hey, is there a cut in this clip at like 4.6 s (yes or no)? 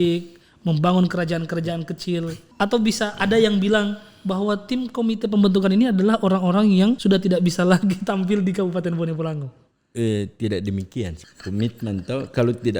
no